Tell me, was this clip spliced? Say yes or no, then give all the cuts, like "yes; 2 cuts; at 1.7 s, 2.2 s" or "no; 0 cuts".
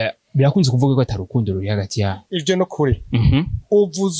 yes; 1 cut; at 2.2 s